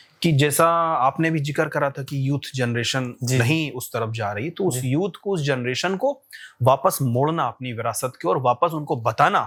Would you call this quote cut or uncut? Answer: uncut